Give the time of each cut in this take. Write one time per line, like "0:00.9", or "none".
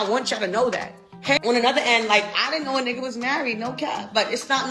0:01.4